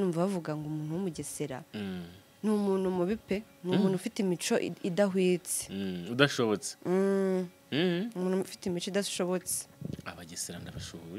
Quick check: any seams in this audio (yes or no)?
no